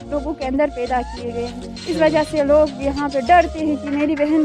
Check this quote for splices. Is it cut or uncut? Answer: uncut